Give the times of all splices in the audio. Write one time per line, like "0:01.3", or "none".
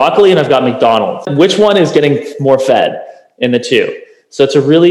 0:01.3